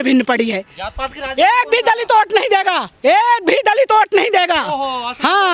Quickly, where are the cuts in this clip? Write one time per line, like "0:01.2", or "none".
none